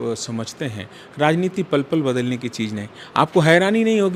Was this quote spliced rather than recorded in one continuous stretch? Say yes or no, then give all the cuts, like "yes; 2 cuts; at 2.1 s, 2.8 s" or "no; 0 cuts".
no; 0 cuts